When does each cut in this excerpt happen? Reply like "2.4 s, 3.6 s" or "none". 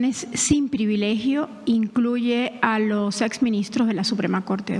none

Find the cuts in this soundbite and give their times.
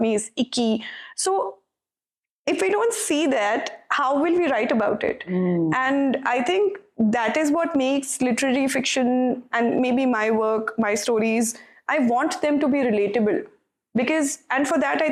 none

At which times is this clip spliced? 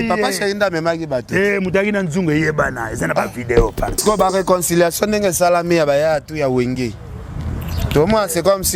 4.0 s

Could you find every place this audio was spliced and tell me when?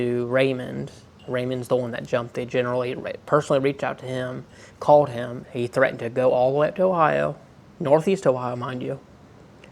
5.4 s

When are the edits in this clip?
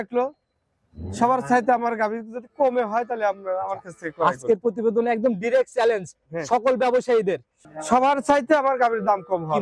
7.5 s

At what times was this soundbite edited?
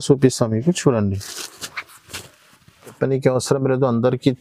3.0 s

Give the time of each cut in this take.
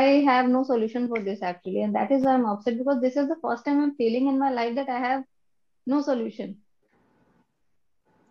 none

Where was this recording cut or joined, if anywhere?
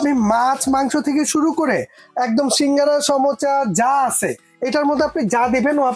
none

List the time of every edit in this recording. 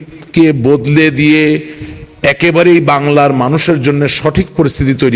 none

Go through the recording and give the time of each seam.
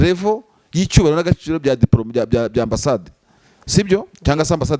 none

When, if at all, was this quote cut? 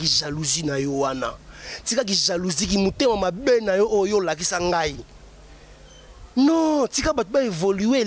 none

